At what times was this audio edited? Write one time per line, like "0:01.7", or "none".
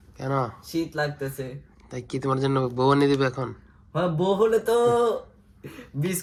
none